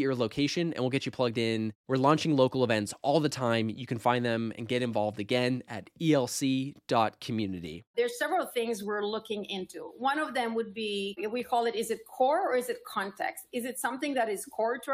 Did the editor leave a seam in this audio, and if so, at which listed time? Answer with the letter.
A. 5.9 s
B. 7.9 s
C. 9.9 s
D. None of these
B